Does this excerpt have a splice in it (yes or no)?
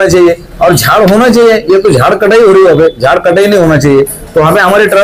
no